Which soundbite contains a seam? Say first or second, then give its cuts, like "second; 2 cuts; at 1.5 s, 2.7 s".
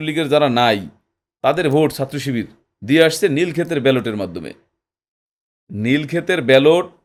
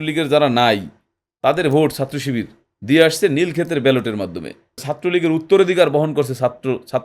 second; 1 cut; at 4.9 s